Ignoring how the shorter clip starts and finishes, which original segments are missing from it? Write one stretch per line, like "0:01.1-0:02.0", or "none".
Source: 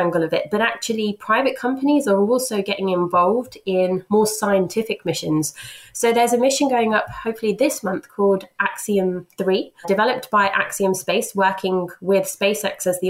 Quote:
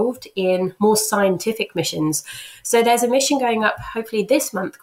none